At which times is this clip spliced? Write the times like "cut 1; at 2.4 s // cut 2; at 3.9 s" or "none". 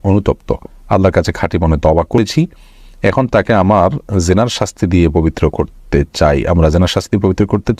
cut 1; at 2.2 s